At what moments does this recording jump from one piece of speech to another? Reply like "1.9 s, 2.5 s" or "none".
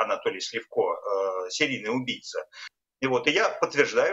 2.6 s

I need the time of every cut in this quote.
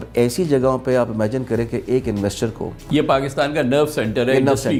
none

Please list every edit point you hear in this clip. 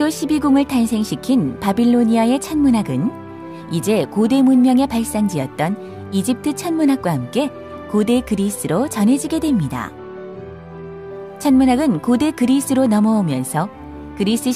7.6 s

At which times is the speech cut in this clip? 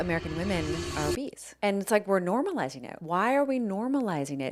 1.2 s, 3.0 s

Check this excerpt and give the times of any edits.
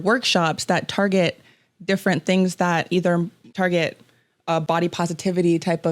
3.4 s

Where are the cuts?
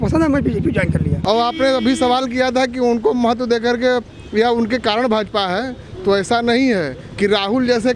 1.2 s

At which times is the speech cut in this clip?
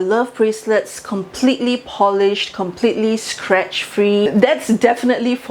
4.3 s

